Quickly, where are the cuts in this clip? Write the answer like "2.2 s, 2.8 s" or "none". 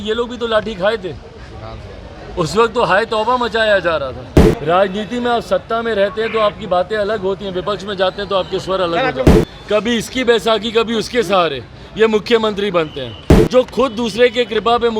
4.4 s, 9.4 s